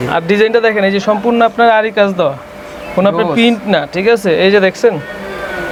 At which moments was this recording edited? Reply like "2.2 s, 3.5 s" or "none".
none